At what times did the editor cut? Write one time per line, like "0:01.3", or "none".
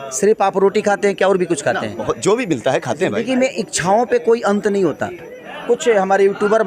0:05.5

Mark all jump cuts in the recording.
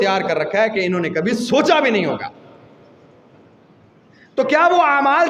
none

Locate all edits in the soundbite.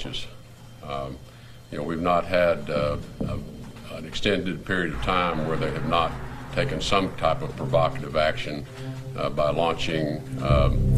0:06.7

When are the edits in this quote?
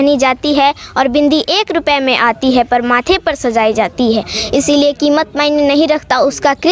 none

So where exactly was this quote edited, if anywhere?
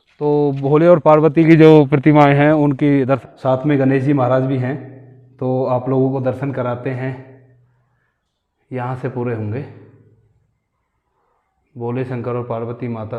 0:03.3

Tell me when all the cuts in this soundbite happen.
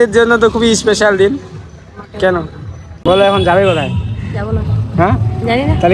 0:02.9

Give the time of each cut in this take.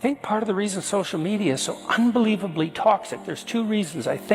none

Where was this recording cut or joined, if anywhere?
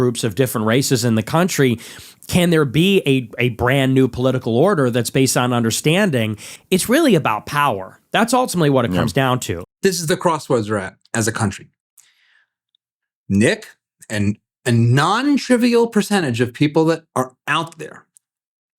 0:06.5

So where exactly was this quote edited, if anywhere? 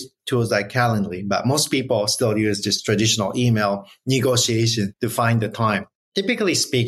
0:04.9
0:06.0

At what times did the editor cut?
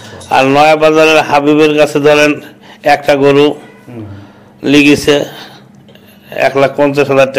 none

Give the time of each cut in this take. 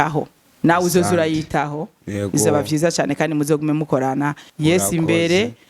0:04.5

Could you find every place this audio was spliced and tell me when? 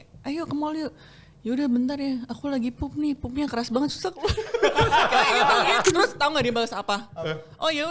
0:05.8

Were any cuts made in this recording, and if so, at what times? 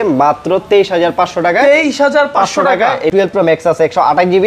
0:03.1

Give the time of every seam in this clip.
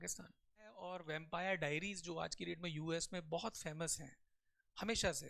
0:01.0

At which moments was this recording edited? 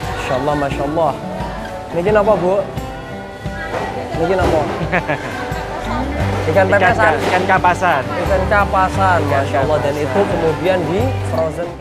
none

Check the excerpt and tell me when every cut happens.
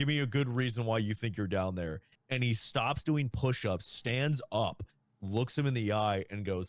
none

